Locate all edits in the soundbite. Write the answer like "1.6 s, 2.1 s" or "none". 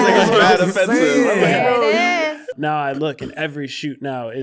2.5 s